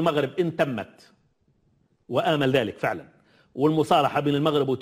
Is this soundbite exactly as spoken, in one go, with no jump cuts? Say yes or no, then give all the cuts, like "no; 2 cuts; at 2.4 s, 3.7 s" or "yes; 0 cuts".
yes; 0 cuts